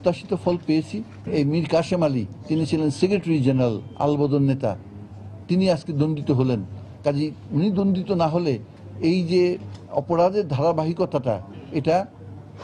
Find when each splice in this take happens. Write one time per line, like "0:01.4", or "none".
none